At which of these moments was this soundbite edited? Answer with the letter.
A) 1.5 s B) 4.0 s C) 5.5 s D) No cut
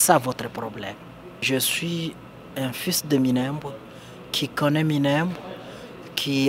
A